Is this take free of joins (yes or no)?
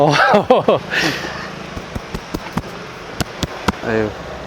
no